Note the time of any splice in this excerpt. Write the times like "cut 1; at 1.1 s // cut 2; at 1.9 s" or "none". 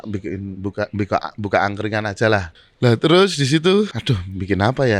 cut 1; at 2.6 s // cut 2; at 4.0 s